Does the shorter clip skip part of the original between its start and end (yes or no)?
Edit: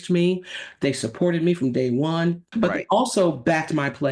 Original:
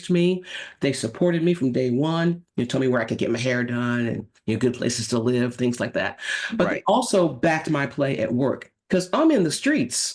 yes